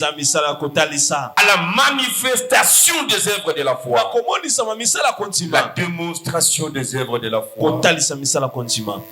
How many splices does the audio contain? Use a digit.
1